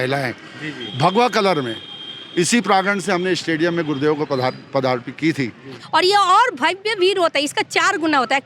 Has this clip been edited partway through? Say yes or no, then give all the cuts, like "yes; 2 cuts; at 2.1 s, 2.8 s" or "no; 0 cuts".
yes; 1 cut; at 5.8 s